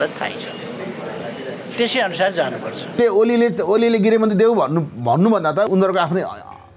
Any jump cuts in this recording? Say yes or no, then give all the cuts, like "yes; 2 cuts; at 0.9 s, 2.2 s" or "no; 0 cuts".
yes; 2 cuts; at 3.0 s, 5.7 s